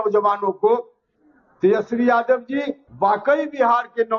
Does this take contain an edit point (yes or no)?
yes